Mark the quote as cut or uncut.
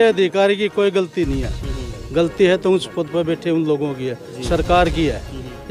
uncut